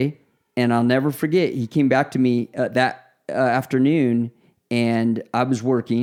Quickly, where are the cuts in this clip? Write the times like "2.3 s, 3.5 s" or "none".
none